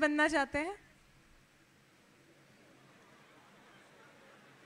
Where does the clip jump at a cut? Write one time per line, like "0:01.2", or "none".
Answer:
none